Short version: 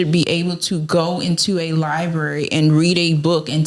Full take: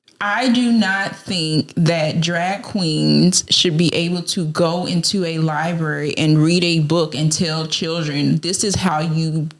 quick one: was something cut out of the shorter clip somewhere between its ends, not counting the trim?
no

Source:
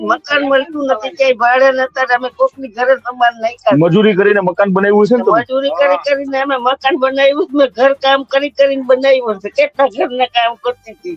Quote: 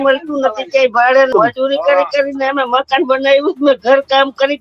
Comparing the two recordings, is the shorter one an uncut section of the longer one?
no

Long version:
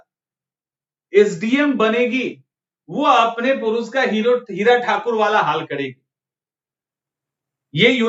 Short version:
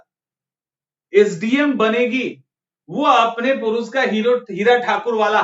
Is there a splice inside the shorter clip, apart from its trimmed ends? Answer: no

